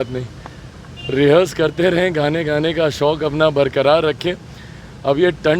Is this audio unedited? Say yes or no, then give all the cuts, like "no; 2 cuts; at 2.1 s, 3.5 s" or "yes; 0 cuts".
yes; 0 cuts